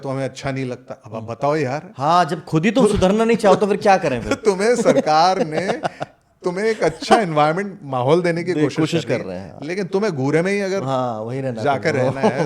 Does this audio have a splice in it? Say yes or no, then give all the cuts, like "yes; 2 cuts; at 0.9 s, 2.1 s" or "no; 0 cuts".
no; 0 cuts